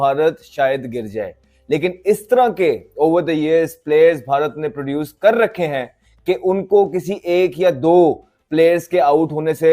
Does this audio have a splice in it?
no; 0 cuts

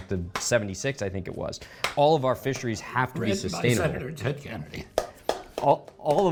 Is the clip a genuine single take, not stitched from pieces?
yes; 0 cuts

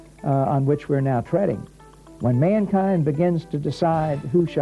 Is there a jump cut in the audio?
yes; 1 cut; at 1.9 s

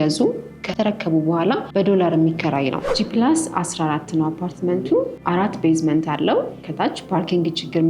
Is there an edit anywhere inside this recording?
yes; 3 cuts; at 1.6 s, 2.9 s, 5.2 s

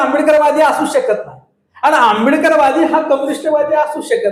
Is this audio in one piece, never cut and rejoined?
yes; 0 cuts

